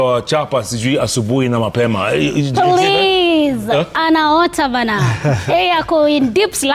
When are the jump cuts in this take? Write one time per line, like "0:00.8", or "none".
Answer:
none